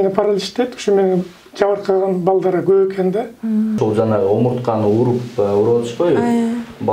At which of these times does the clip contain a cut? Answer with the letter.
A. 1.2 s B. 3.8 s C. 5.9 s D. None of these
B